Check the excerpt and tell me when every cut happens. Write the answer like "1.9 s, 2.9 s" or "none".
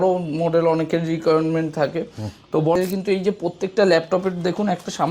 2.8 s